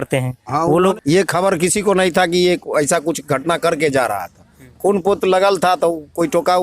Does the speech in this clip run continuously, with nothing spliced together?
no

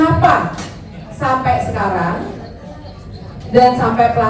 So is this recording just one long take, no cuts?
yes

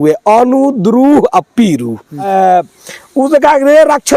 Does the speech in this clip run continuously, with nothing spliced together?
no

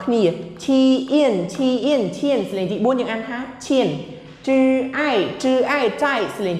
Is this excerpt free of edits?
yes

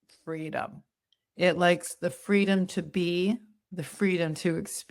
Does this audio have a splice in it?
no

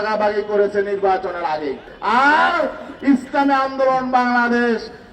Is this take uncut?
no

